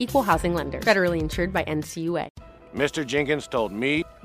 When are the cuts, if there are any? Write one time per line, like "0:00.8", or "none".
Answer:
0:02.4